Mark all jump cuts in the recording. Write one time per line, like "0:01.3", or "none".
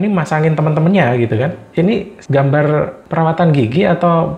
0:01.7